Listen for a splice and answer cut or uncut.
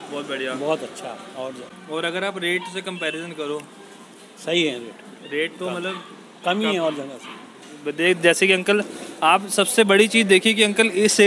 uncut